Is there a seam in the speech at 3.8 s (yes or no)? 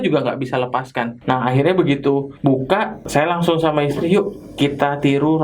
no